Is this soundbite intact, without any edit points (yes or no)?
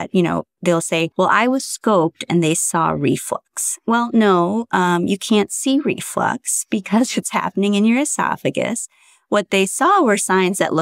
yes